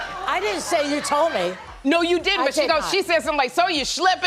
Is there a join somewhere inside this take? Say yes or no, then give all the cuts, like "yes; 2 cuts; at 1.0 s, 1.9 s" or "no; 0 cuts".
no; 0 cuts